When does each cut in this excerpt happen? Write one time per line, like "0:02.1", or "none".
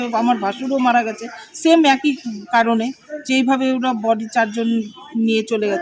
none

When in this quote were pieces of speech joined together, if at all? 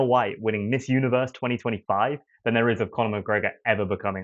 none

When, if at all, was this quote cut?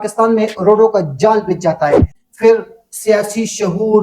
0:02.1

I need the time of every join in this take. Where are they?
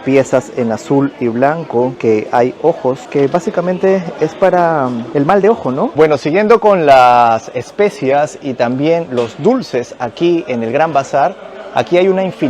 0:06.0

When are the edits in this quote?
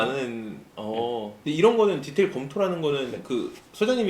0:01.4

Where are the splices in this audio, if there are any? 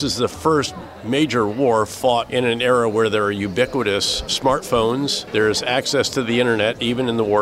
0:02.3
0:04.3
0:05.2

